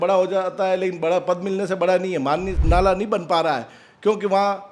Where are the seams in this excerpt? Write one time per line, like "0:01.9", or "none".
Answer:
0:02.6